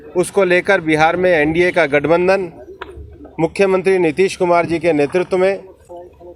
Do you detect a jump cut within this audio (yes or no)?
no